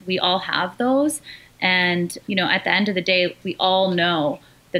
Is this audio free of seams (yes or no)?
no